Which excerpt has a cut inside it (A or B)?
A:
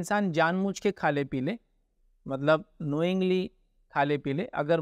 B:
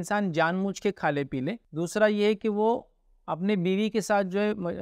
B